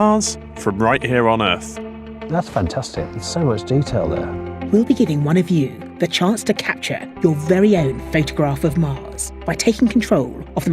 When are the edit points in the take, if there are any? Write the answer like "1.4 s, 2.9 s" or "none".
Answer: 1.3 s